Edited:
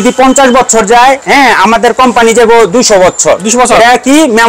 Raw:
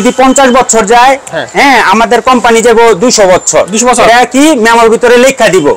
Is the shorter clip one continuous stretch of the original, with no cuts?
no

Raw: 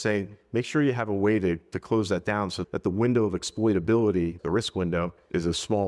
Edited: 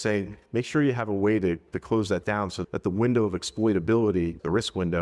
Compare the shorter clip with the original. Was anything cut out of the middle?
no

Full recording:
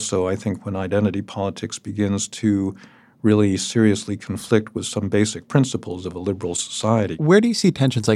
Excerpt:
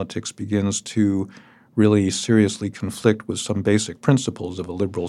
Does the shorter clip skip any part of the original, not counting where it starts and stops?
no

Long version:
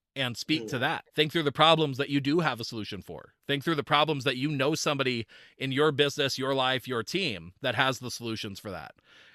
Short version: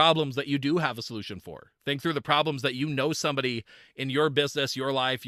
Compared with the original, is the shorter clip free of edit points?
yes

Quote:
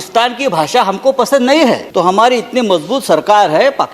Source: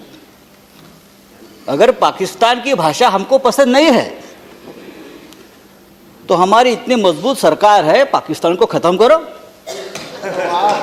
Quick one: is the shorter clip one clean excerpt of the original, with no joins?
no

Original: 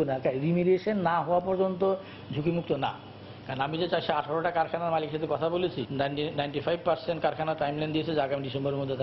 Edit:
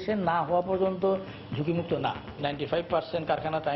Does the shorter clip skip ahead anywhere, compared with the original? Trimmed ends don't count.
yes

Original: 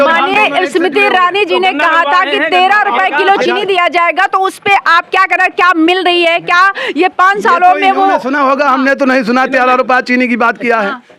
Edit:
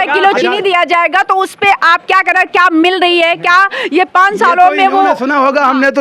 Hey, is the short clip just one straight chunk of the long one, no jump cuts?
yes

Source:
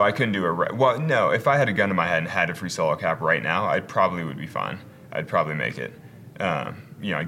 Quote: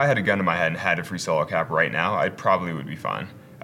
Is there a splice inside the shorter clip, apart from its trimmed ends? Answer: no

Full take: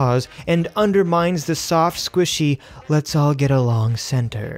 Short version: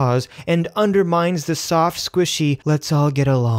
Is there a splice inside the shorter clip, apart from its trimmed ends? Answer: yes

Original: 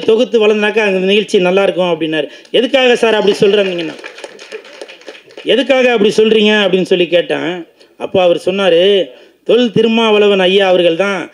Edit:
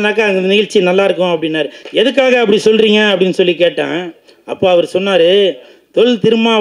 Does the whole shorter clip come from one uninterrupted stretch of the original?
no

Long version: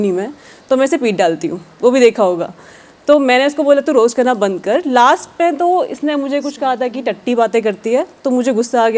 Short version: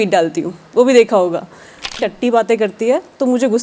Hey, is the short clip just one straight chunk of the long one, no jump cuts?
no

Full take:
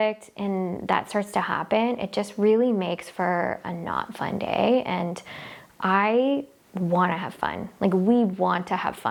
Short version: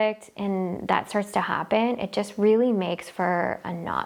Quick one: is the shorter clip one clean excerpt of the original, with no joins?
yes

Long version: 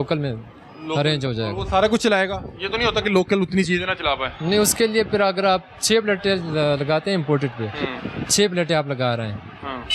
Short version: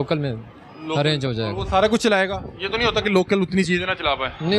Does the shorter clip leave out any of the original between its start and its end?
no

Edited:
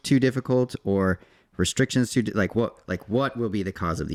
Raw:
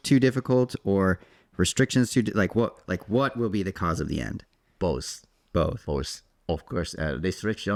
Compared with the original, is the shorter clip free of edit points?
yes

